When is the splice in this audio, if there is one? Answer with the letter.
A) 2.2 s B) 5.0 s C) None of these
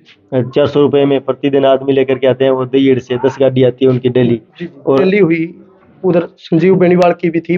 B